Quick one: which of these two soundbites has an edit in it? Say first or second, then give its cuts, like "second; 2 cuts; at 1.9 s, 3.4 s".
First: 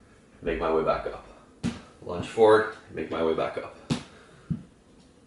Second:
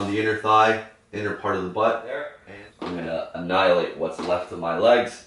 second; 1 cut; at 2.4 s